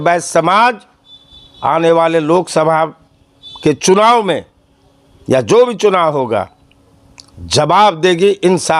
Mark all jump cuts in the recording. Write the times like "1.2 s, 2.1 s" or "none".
none